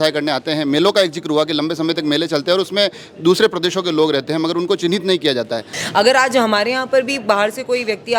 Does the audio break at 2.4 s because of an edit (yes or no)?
no